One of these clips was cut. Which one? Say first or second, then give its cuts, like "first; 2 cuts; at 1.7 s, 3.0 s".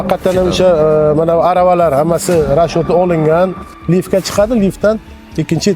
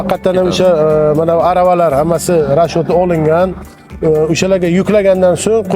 first; 1 cut; at 3.7 s